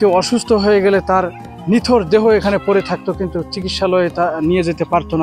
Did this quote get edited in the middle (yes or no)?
no